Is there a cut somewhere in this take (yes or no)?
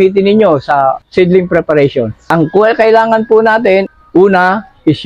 yes